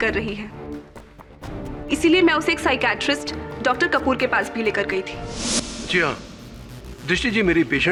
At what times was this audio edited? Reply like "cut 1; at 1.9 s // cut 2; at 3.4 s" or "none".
none